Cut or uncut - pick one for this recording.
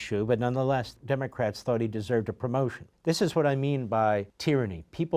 cut